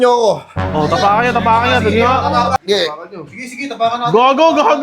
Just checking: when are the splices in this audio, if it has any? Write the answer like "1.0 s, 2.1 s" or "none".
2.6 s